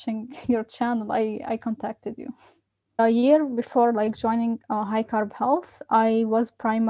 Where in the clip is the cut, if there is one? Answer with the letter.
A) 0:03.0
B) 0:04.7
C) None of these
A